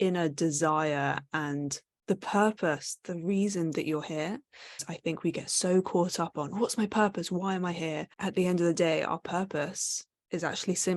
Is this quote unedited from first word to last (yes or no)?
no